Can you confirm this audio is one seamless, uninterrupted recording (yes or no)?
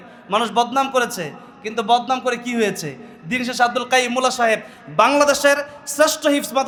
yes